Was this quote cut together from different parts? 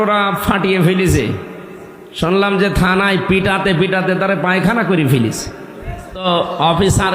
yes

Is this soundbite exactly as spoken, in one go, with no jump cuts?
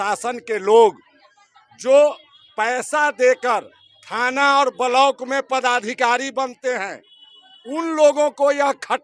yes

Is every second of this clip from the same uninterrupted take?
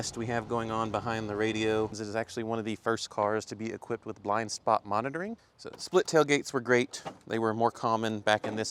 no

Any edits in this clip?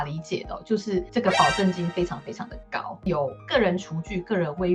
yes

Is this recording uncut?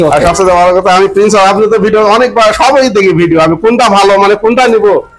yes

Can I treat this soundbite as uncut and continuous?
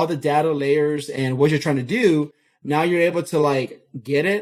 yes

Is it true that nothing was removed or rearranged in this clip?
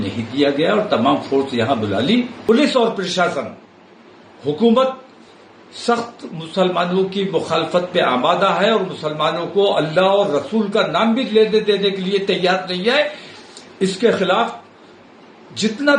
no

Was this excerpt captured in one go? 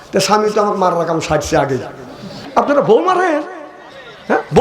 no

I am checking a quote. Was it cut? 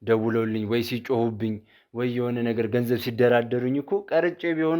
no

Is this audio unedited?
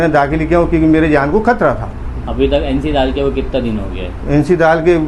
yes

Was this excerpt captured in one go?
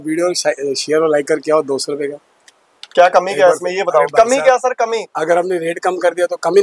yes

